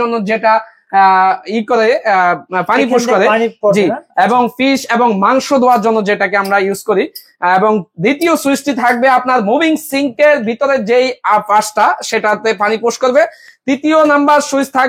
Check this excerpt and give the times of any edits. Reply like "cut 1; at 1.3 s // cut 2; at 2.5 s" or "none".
none